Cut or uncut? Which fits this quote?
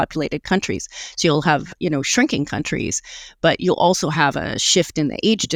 uncut